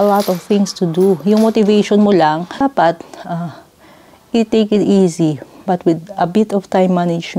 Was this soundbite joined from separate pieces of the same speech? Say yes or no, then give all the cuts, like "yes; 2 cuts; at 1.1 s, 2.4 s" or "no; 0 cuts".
yes; 1 cut; at 2.5 s